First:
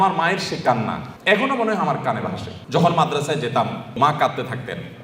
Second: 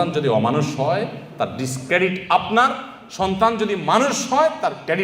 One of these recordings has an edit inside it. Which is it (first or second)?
first